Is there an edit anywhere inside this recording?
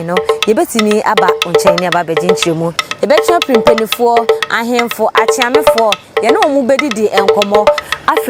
no; 0 cuts

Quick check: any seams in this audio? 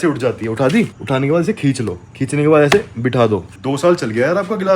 yes; 1 cut; at 3.5 s

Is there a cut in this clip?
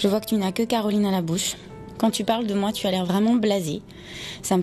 no; 0 cuts

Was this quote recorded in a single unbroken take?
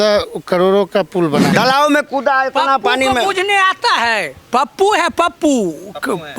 no; 1 cut; at 1.5 s

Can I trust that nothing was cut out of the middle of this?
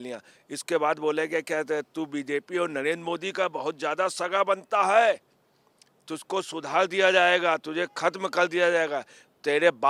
yes; 0 cuts

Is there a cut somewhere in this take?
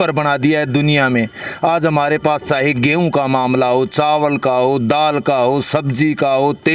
no; 0 cuts

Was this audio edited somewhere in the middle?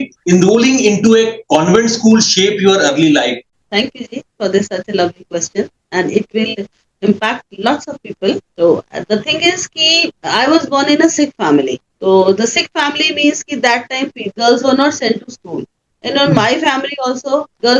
yes; 1 cut; at 3.6 s

